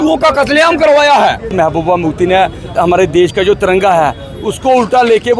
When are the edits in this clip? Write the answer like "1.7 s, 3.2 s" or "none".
1.5 s, 2.7 s